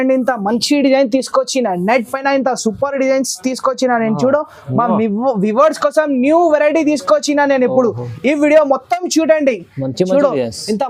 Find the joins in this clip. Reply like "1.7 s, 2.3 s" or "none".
none